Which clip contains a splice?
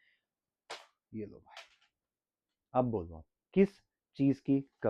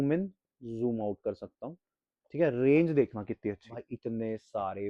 second; 1 cut; at 3.8 s

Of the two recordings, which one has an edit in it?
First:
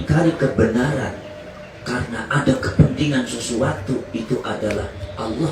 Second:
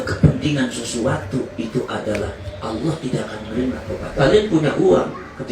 second; 1 cut; at 4.1 s

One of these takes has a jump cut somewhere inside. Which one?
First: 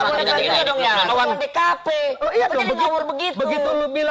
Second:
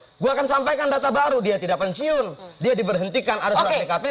first; 1 cut; at 1.1 s

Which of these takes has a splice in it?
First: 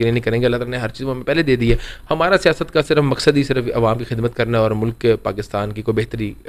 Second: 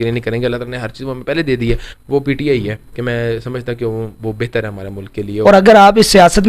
second; 2 cuts; at 1.9 s, 5.3 s

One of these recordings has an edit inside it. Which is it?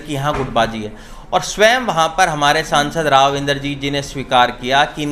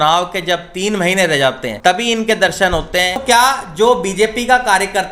second; 2 cuts; at 1.7 s, 3.2 s

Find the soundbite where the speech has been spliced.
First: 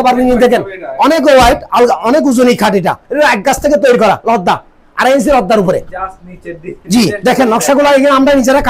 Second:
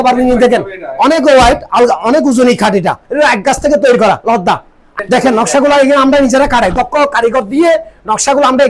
second; 1 cut; at 5.0 s

